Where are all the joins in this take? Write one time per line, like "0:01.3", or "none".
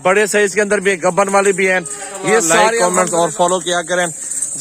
0:02.8